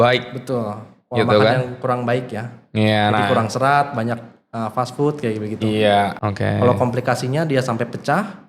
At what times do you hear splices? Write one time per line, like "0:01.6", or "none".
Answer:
0:06.1